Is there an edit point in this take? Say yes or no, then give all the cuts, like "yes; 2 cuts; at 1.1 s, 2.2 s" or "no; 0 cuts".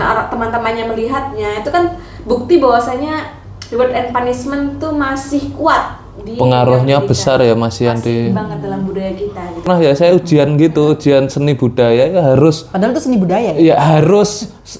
yes; 1 cut; at 9.7 s